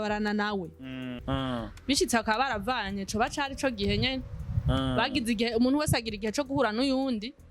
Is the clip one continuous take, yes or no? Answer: no